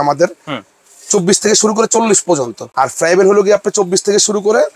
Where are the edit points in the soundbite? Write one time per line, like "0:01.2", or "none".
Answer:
0:02.6